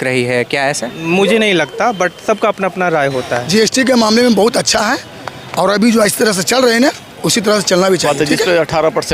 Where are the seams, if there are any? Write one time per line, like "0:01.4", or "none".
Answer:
0:00.9
0:03.4
0:08.0